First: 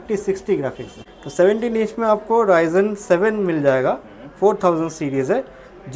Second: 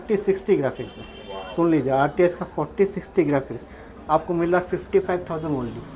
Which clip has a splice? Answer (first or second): first